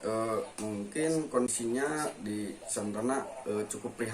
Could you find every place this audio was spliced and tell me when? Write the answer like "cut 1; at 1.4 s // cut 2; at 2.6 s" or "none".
cut 1; at 1.5 s

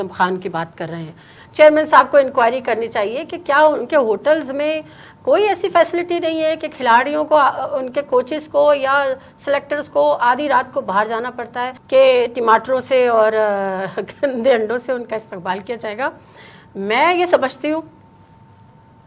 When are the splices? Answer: cut 1; at 1.4 s // cut 2; at 11.7 s

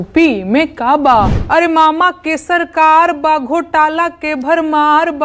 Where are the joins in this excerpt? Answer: cut 1; at 1.4 s

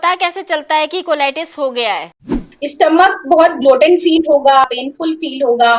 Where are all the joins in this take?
cut 1; at 2.4 s // cut 2; at 4.8 s

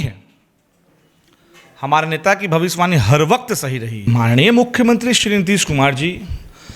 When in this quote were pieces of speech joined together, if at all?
cut 1; at 4.1 s

